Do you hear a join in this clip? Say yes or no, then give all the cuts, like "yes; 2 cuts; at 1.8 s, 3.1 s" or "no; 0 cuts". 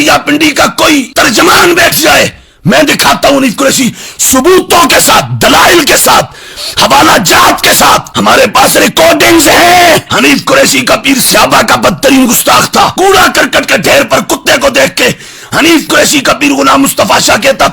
no; 0 cuts